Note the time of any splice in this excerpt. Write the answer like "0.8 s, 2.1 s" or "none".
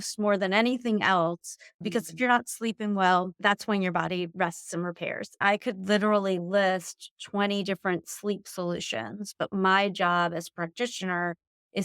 5.4 s